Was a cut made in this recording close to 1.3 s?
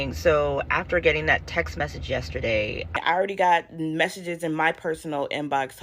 no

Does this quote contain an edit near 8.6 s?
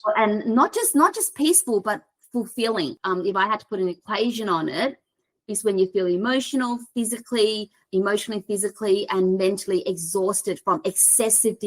no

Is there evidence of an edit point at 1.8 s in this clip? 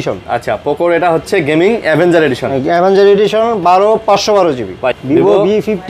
no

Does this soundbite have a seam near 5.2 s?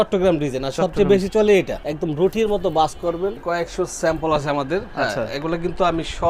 no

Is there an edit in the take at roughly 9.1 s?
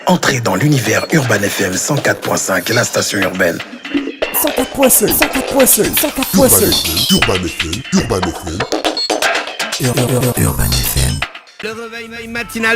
no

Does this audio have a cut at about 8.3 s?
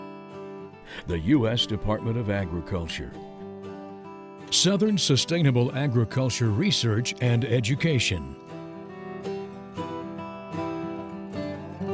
yes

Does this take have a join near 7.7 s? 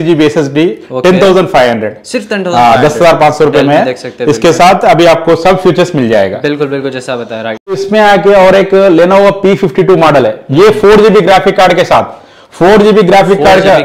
yes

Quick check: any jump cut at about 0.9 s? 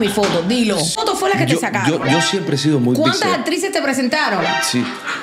yes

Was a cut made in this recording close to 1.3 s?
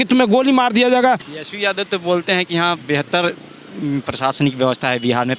yes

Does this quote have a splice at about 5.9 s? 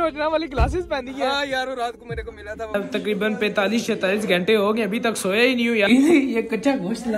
yes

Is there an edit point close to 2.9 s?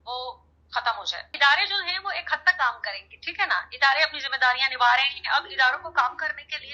no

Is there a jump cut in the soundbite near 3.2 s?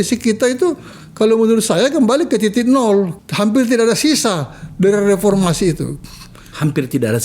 yes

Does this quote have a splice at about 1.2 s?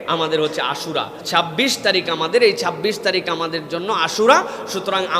yes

